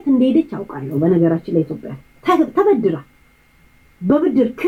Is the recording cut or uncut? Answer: uncut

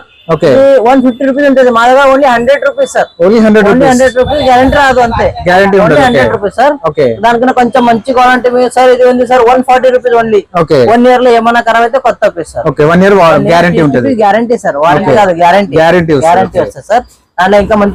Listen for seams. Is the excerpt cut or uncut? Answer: uncut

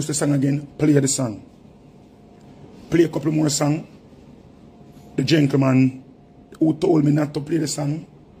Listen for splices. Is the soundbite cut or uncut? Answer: uncut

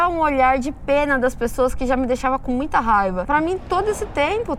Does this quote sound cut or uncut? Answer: cut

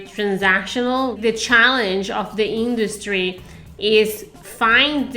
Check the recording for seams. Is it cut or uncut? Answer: cut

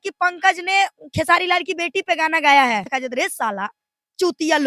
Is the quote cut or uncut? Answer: cut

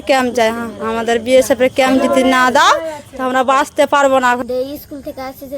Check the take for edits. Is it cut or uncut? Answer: cut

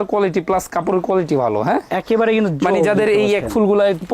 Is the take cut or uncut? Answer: uncut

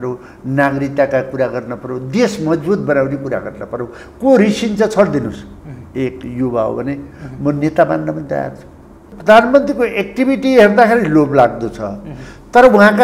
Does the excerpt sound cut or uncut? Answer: cut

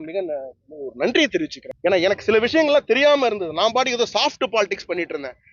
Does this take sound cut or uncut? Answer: cut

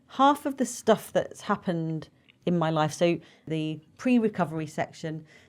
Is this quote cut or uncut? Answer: cut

